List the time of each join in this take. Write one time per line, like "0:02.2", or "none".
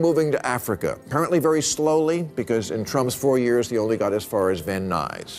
none

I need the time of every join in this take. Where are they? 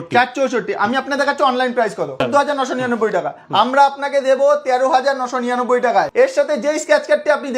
0:02.2
0:06.1

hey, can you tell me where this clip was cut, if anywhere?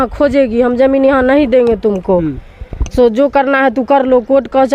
none

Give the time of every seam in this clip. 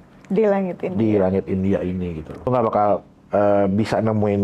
0:02.5

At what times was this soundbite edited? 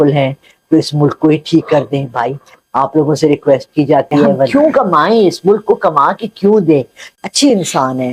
0:04.5
0:07.0

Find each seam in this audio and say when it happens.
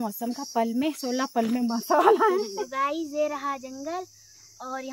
0:02.6

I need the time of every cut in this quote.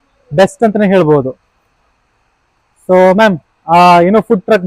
none

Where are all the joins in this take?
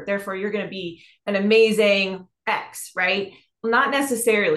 0:03.6

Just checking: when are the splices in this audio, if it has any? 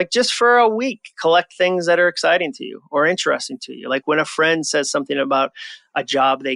none

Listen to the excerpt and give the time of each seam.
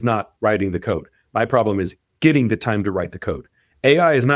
none

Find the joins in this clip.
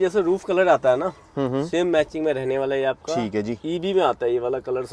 none

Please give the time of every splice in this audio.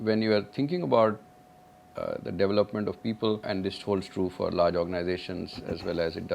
0:03.4

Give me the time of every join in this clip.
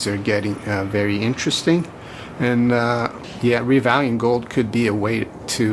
0:03.2

